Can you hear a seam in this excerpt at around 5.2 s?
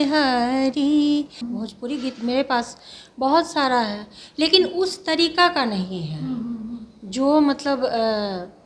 no; 1 cut; at 1.4 s

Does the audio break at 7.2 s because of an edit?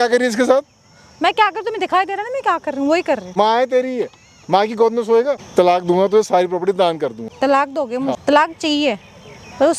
yes; 4 cuts; at 3.3 s, 5.4 s, 7.2 s, 8.2 s

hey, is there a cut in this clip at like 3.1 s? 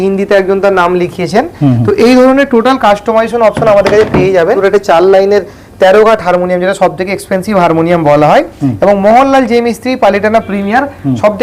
no; 1 cut; at 4.6 s

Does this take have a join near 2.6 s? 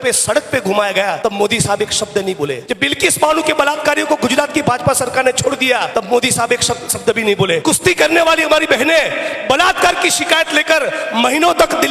yes; 4 cuts; at 1.2 s, 2.6 s, 5.9 s, 7.6 s

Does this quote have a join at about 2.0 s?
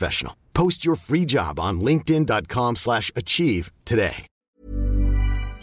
no; 1 cut; at 4.5 s

